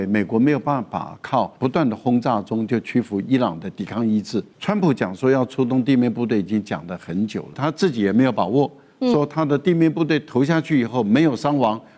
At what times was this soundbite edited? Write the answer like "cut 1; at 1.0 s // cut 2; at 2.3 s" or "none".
cut 1; at 1.5 s // cut 2; at 4.5 s // cut 3; at 7.6 s